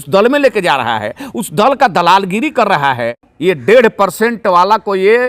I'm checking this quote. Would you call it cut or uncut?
cut